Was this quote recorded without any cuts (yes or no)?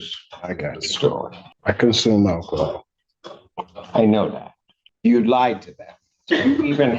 no